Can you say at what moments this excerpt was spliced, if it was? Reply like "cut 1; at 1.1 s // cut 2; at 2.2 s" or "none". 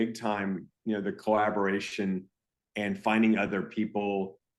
none